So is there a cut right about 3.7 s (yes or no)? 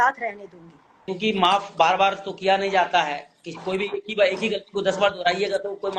no